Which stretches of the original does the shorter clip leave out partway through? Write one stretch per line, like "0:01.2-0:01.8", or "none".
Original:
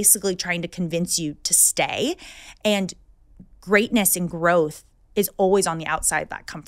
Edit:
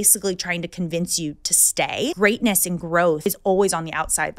0:02.2-0:03.7
0:04.7-0:05.1